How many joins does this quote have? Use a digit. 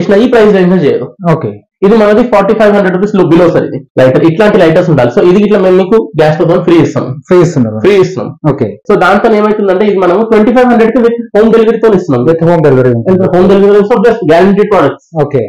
2